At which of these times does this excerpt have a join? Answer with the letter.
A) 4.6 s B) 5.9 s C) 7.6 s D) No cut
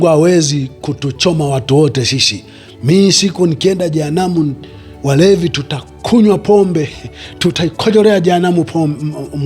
C